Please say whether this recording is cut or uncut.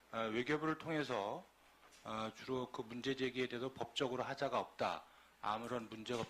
uncut